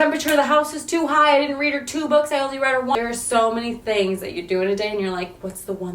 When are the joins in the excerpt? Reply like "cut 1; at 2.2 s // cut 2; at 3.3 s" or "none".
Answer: cut 1; at 2.9 s